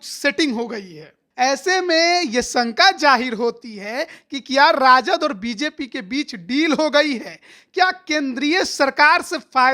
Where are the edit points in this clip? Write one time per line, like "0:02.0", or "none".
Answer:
0:01.2

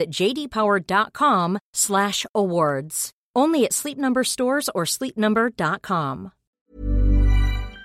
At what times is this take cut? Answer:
0:06.5

